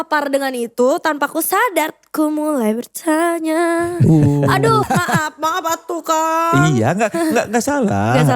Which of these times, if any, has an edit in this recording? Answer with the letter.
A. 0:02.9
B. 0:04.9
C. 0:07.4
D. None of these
B